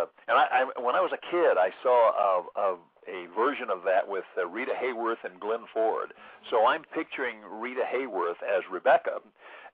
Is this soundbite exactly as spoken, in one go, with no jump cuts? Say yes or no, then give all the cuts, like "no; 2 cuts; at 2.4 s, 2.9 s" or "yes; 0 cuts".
yes; 0 cuts